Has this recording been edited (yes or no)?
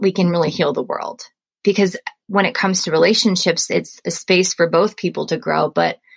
yes